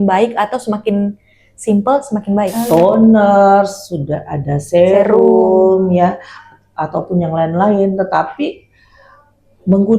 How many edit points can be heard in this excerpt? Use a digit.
1